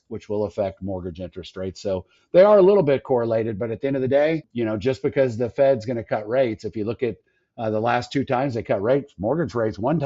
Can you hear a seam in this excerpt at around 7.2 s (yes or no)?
no